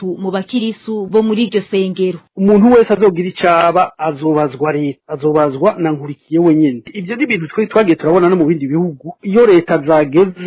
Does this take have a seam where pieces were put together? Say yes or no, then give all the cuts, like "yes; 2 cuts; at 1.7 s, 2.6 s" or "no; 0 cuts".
yes; 1 cut; at 2.2 s